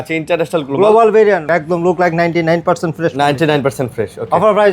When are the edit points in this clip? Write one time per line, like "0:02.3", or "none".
0:01.4